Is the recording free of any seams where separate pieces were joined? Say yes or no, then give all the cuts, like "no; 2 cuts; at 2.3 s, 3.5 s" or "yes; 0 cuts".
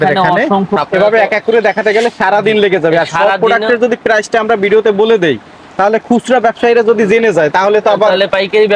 yes; 0 cuts